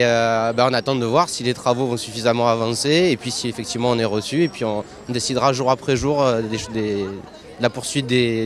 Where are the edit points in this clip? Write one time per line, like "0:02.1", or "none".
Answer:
0:04.2